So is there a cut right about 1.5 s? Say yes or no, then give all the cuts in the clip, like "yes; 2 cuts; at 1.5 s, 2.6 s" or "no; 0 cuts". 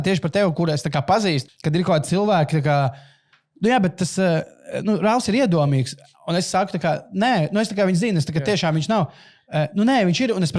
yes; 1 cut; at 1.5 s